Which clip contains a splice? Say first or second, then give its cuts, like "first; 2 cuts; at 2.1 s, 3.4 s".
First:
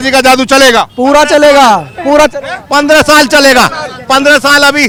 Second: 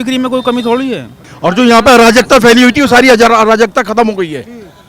second; 1 cut; at 1.2 s